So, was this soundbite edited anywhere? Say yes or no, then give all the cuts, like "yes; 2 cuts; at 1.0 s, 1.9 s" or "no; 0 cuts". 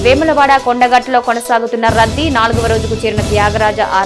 no; 0 cuts